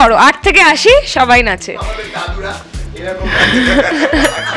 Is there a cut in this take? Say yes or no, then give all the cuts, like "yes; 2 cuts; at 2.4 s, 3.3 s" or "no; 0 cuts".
no; 0 cuts